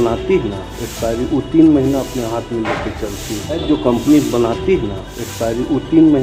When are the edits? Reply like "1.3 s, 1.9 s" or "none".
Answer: none